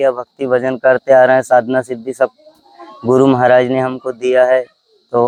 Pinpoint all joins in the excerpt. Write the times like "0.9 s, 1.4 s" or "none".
none